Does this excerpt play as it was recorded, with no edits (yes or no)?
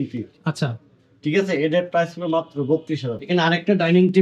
no